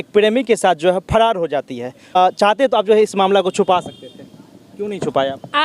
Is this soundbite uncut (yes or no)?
no